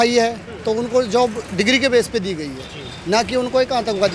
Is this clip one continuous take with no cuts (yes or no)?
yes